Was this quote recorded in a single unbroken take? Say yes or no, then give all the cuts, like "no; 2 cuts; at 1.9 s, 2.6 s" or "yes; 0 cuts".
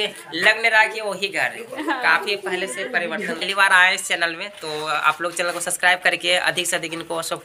no; 1 cut; at 3.4 s